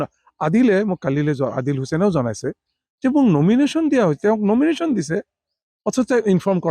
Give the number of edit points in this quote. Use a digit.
0